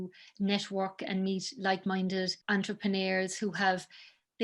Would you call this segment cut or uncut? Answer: cut